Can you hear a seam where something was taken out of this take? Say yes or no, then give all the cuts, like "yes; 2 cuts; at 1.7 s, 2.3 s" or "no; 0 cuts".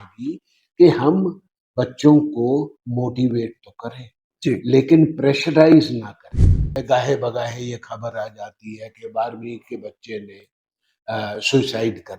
yes; 1 cut; at 6.7 s